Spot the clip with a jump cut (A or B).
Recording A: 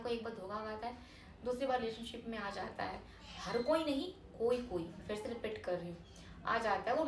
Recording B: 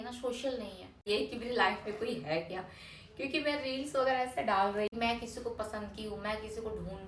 B